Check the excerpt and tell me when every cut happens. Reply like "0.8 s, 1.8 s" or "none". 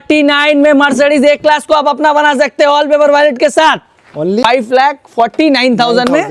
none

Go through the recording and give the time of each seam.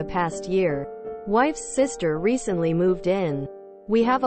none

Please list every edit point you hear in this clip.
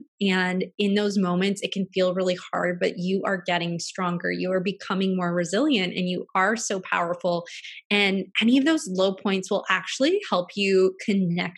none

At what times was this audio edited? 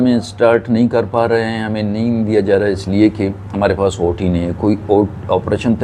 none

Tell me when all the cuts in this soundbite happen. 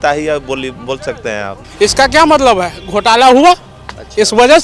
1.6 s

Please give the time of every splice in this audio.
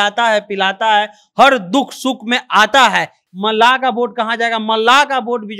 3.2 s

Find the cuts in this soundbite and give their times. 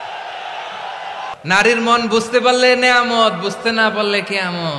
1.3 s

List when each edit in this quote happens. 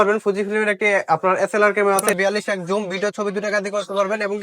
2.1 s

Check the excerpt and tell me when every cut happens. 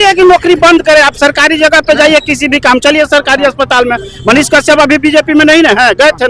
none

